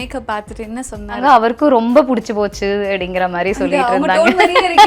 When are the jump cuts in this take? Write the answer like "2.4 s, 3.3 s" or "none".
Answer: 1.2 s